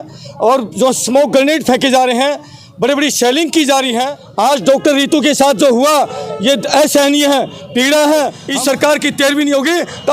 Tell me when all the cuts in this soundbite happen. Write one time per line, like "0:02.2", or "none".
0:04.2
0:08.4